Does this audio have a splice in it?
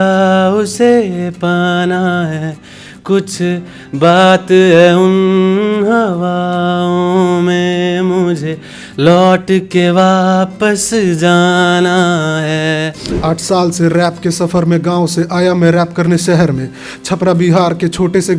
yes; 1 cut; at 13.0 s

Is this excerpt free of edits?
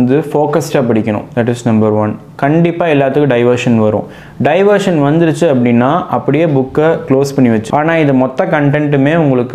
no; 1 cut; at 7.6 s

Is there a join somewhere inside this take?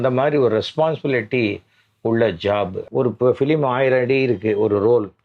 yes; 1 cut; at 2.8 s

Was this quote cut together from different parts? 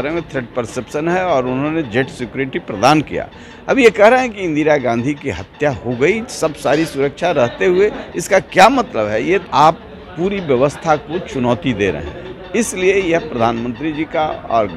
yes; 1 cut; at 9.4 s

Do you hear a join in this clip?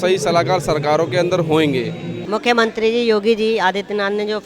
yes; 1 cut; at 2.1 s

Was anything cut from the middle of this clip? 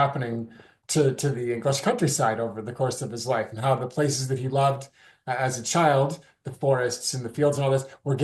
no; 0 cuts

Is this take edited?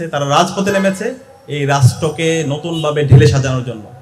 no; 0 cuts

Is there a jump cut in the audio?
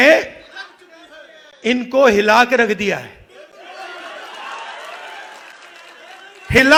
no; 0 cuts

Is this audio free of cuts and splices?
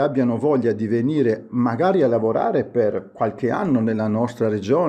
yes; 0 cuts

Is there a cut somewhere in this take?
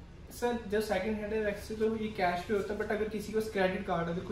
no; 0 cuts

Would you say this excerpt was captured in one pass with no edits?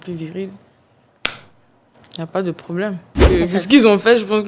no; 1 cut; at 3.1 s

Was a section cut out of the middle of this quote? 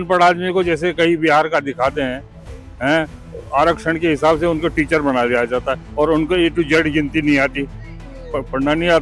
no; 0 cuts

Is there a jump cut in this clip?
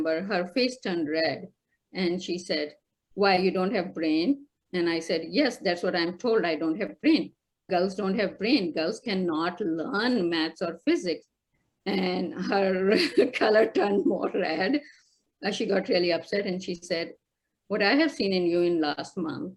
no; 0 cuts

